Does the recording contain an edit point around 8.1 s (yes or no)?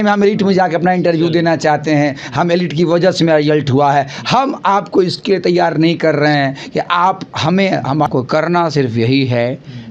yes